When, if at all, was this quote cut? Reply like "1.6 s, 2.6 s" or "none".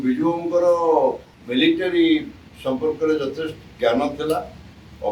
1.3 s

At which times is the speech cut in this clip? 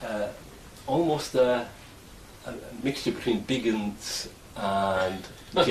4.2 s

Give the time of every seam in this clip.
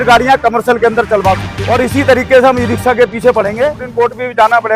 1.5 s, 3.8 s

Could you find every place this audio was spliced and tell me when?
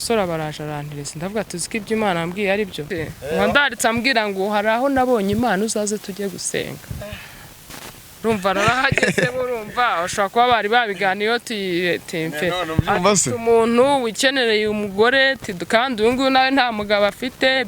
2.8 s

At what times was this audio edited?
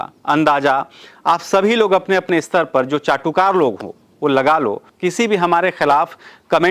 4.9 s

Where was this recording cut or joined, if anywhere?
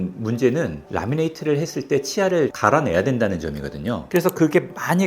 4.0 s

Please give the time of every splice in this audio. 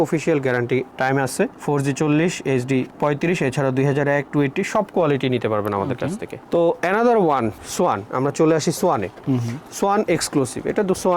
none

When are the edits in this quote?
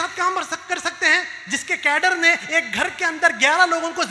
none

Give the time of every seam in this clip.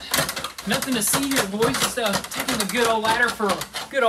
none

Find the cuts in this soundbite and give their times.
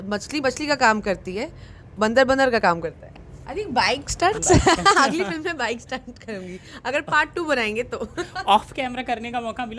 3.1 s

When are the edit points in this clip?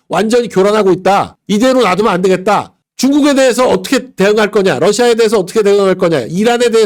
2.9 s

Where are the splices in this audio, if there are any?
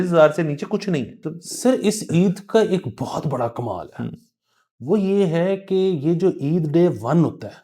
1.2 s

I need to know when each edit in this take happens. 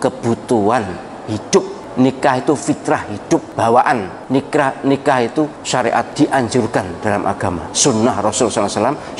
1.8 s, 3.5 s, 4.1 s, 6.0 s, 7.7 s

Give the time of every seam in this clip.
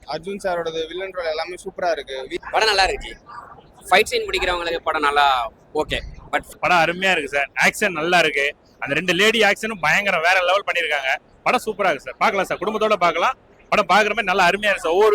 2.4 s, 6.4 s

